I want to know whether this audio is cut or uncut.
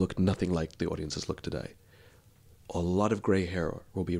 uncut